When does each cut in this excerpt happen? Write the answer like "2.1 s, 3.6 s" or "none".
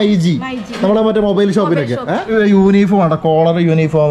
2.3 s